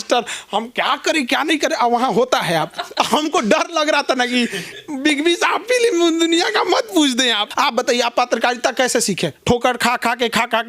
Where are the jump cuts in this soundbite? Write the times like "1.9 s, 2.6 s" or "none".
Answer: 7.4 s